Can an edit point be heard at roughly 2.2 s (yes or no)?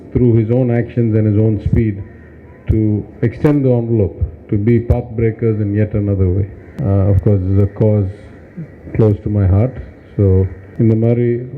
no